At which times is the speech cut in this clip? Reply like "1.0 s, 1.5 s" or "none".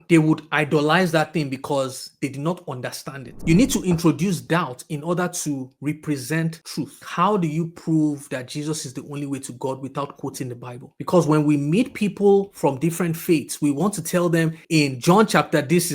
3.4 s, 7.0 s